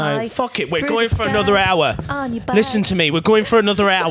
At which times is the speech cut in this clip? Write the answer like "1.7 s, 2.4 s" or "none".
none